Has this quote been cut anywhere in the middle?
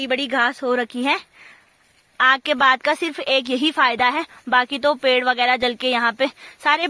no; 0 cuts

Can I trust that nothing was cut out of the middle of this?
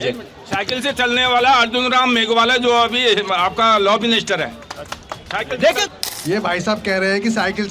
no; 1 cut; at 5.9 s

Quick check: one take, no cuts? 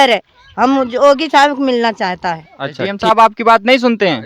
no; 1 cut; at 2.8 s

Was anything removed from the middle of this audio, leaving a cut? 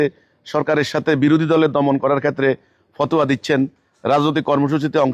no; 0 cuts

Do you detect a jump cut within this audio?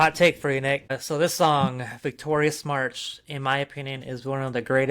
yes; 1 cut; at 1.0 s

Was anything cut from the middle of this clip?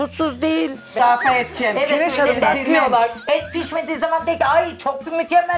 yes; 1 cut; at 1.0 s

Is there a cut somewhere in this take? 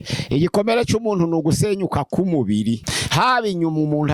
yes; 1 cut; at 2.9 s

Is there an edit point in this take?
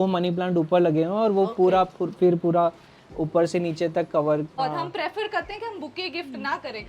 yes; 1 cut; at 4.6 s

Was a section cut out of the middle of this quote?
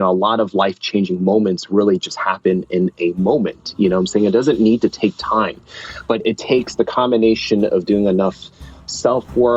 no; 0 cuts

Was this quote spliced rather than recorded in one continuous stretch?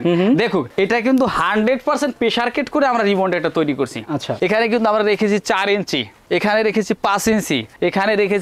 yes; 1 cut; at 4.3 s

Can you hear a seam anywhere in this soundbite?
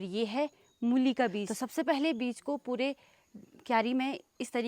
yes; 1 cut; at 1.5 s

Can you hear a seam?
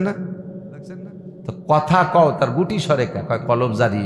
no; 0 cuts

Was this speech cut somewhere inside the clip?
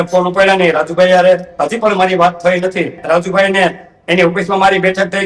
yes; 1 cut; at 3.0 s

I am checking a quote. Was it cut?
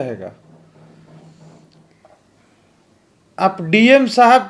yes; 1 cut; at 1.8 s

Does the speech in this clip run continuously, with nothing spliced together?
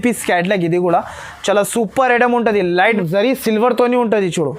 no; 1 cut; at 3.0 s

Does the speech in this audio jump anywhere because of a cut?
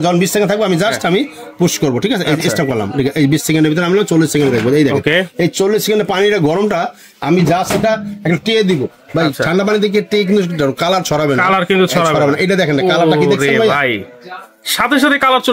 no; 0 cuts

